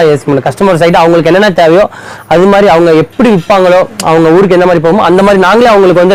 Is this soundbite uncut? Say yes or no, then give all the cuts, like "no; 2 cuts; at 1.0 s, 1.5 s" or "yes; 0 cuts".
yes; 0 cuts